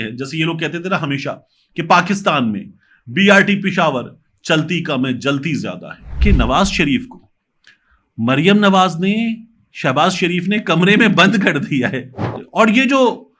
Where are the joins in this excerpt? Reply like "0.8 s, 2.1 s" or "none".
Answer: 6.1 s, 12.3 s

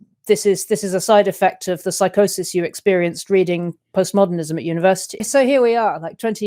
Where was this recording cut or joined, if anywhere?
5.3 s

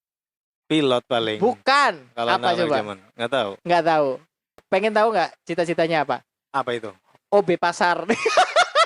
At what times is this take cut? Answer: 4.6 s

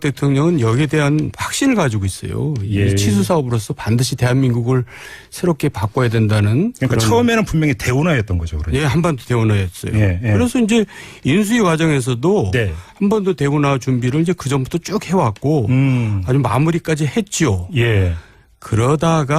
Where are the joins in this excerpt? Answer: 4.1 s

